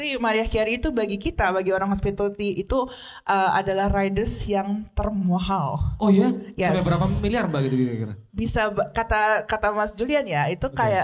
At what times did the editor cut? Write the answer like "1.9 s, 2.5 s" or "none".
none